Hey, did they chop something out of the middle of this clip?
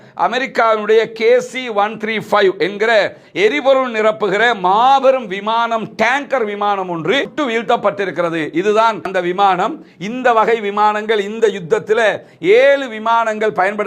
no; 0 cuts

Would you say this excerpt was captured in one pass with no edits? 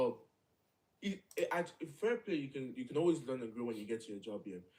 yes; 0 cuts

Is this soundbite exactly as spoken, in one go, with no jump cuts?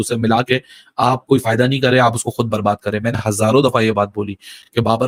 yes; 0 cuts

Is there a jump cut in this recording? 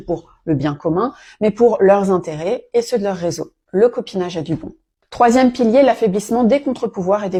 no; 0 cuts

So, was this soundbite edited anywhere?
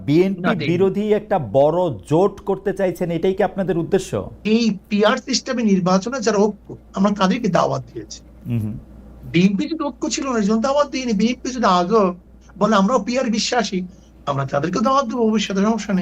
yes; 1 cut; at 4.4 s

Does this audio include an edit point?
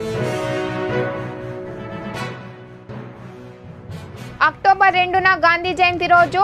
yes; 2 cuts; at 2.1 s, 4.0 s

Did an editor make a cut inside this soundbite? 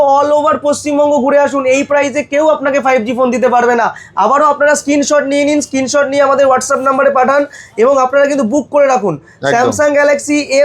no; 0 cuts

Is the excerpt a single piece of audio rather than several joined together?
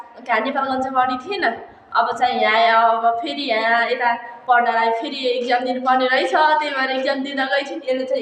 yes; 0 cuts

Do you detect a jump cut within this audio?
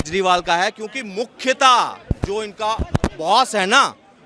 no; 0 cuts

